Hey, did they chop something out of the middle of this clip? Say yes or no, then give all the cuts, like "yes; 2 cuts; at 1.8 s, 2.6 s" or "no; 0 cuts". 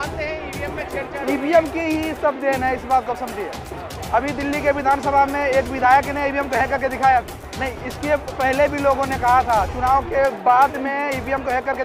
yes; 1 cut; at 7.4 s